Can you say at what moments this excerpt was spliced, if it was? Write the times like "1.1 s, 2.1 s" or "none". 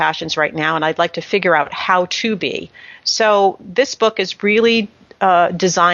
none